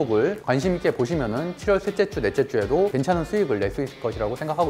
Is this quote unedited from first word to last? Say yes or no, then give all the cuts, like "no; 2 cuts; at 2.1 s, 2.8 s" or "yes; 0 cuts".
yes; 0 cuts